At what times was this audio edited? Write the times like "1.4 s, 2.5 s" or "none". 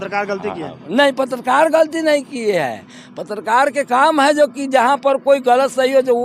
none